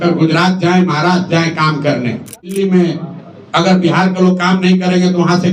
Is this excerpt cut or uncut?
cut